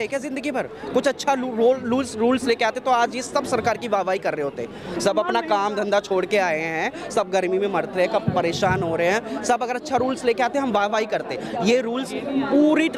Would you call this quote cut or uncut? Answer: uncut